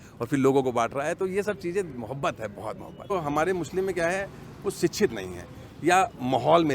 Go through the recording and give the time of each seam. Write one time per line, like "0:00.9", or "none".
0:03.1